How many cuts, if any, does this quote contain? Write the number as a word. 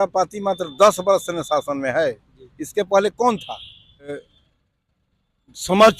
one